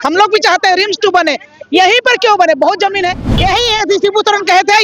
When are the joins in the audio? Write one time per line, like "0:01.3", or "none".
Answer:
0:03.3